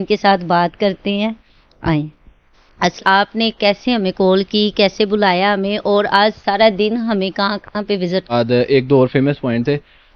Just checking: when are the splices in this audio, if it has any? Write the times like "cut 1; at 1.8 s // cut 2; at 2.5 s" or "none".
cut 1; at 3.0 s // cut 2; at 8.3 s